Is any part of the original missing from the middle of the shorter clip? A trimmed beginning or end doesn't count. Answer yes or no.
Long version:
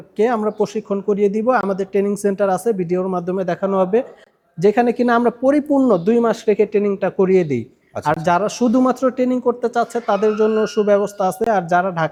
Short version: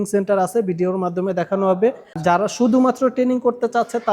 yes